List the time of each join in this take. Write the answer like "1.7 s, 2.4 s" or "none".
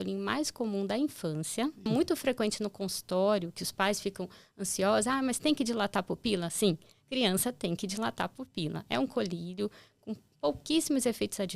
1.9 s